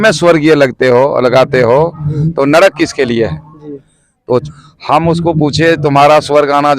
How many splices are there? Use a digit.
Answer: 1